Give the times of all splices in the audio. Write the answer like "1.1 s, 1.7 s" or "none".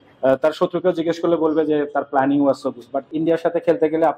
3.1 s

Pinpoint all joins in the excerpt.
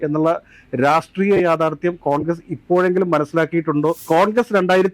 4.0 s

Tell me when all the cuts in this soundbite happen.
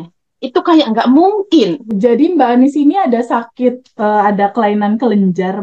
1.8 s

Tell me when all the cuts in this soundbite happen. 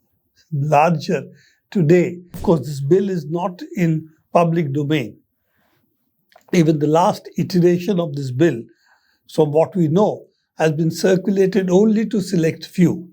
2.3 s

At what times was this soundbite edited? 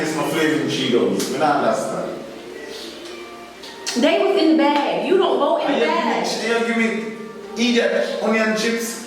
3.6 s

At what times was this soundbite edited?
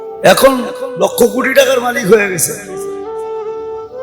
3.0 s

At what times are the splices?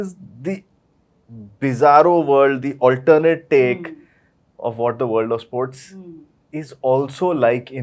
none

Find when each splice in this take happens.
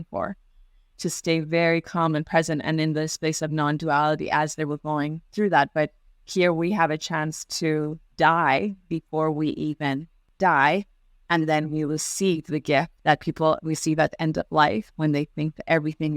8.1 s, 10.2 s, 12.9 s

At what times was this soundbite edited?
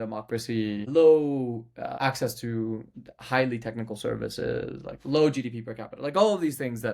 0.8 s, 1.9 s

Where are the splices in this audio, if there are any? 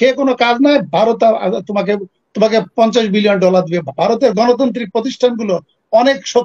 none

